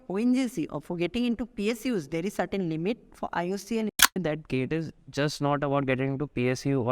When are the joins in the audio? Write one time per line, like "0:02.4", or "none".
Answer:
0:04.1